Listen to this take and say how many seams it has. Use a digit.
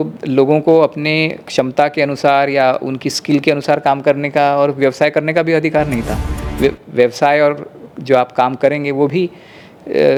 0